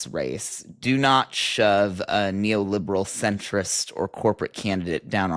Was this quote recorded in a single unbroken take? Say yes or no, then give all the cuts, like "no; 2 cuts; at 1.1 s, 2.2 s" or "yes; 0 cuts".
yes; 0 cuts